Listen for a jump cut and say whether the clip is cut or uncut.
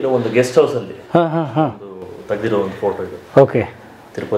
uncut